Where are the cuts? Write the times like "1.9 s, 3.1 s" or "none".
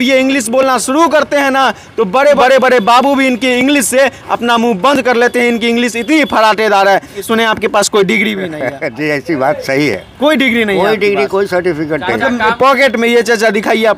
2.4 s, 7.2 s, 12.5 s